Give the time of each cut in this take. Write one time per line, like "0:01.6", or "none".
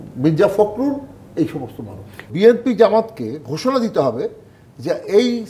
0:02.3